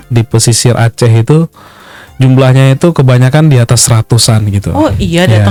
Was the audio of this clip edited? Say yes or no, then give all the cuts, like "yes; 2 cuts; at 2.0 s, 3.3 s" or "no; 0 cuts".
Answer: no; 0 cuts